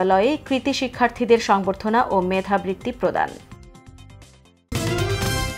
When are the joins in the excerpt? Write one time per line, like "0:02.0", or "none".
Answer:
0:04.7